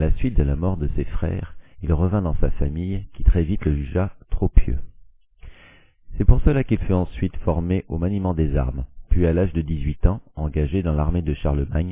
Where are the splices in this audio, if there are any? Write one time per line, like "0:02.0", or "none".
0:06.5